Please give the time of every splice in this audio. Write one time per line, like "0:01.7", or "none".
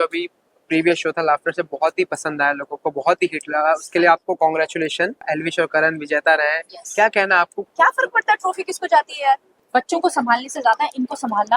0:05.2
0:07.6
0:09.5